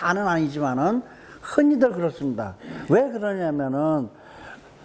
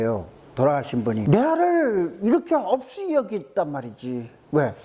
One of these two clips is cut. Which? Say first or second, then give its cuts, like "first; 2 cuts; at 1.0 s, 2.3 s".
second; 1 cut; at 1.2 s